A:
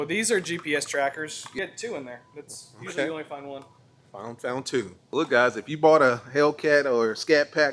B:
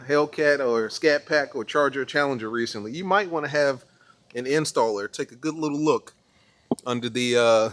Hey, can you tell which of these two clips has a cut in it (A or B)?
A